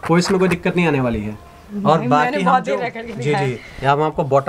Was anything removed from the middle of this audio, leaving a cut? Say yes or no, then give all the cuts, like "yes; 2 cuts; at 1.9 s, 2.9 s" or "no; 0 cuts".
no; 0 cuts